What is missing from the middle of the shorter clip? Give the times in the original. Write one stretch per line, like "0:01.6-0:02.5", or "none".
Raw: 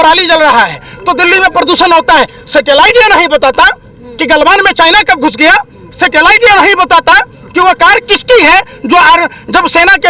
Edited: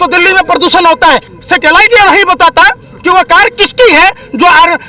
0:02.4-0:05.8